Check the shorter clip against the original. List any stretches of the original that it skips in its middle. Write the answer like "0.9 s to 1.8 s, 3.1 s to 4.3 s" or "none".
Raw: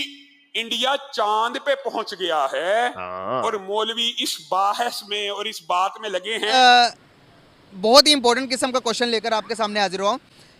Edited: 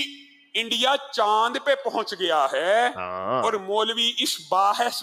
none